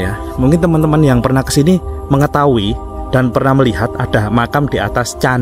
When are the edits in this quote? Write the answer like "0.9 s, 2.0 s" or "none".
none